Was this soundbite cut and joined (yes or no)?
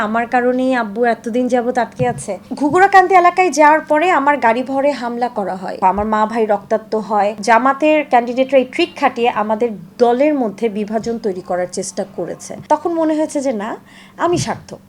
yes